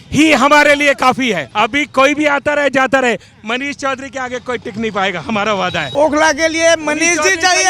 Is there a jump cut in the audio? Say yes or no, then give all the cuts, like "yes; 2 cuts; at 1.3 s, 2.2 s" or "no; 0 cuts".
yes; 2 cuts; at 1.4 s, 5.9 s